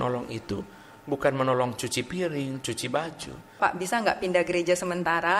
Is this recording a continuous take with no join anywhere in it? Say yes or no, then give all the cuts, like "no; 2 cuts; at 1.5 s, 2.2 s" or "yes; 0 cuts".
no; 1 cut; at 3.6 s